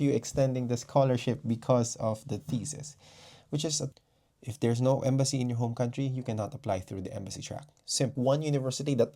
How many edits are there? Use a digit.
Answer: 2